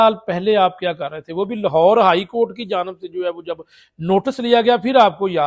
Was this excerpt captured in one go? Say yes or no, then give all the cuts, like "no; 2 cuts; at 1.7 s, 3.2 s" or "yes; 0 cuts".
yes; 0 cuts